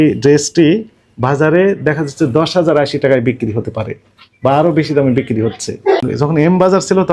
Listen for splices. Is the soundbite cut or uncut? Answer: cut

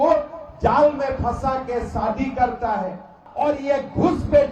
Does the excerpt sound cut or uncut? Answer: cut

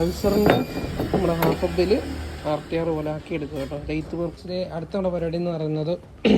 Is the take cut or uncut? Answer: cut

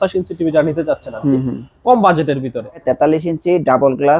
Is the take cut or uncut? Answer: cut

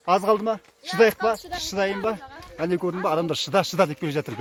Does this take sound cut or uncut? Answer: uncut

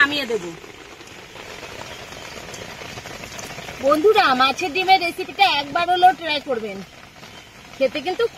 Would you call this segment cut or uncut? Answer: cut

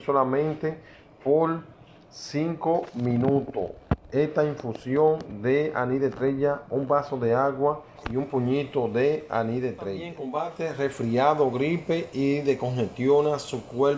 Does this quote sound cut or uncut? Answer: cut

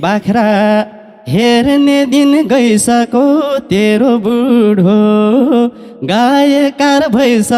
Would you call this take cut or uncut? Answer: uncut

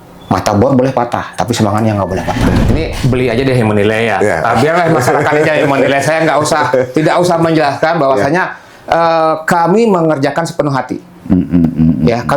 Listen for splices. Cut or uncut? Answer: cut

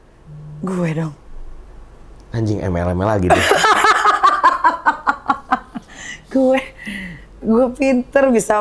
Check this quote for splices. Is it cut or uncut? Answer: uncut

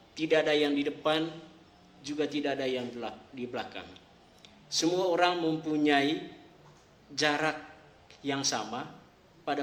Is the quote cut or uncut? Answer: uncut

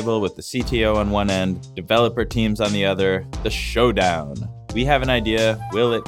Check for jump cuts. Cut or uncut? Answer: cut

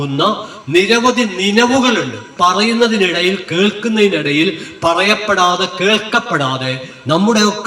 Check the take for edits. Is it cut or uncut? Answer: cut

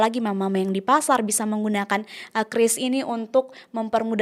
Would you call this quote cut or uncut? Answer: uncut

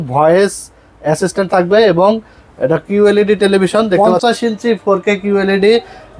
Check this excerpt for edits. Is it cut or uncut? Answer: cut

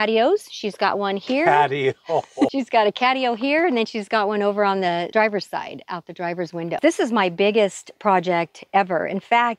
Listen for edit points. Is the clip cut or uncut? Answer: cut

